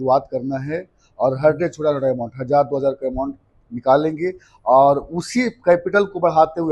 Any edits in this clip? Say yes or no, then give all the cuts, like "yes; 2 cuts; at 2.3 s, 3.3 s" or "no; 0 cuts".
no; 0 cuts